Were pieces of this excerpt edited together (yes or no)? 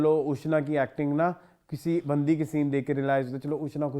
no